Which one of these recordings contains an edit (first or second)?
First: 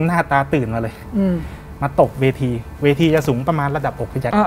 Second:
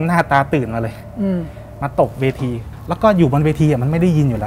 second